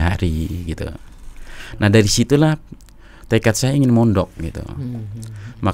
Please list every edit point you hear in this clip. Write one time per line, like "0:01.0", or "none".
none